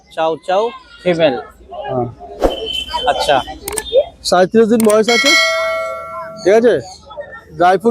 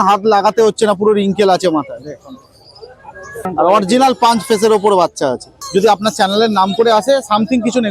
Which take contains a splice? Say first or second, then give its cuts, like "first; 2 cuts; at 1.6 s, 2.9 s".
second; 2 cuts; at 3.5 s, 5.5 s